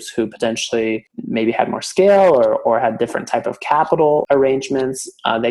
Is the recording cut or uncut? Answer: cut